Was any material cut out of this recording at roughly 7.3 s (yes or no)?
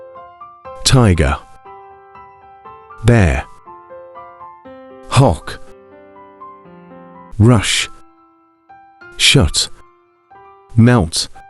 yes